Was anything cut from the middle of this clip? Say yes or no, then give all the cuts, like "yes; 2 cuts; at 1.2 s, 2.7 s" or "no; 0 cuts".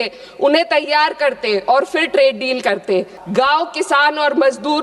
yes; 1 cut; at 3.2 s